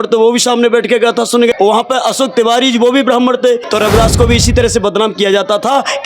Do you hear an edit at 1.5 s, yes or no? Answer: yes